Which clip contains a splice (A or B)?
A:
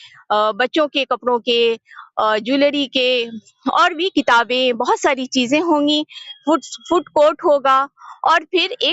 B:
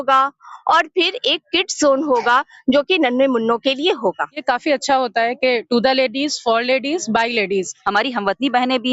B